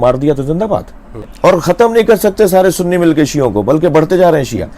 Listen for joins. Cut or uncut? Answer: cut